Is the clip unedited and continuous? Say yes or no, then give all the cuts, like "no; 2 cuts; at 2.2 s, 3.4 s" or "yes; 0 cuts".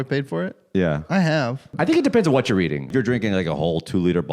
no; 2 cuts; at 1.7 s, 2.9 s